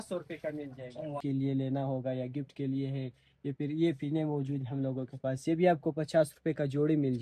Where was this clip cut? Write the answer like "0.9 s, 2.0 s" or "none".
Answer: 1.2 s